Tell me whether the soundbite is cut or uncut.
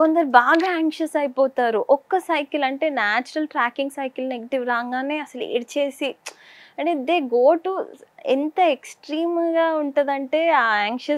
uncut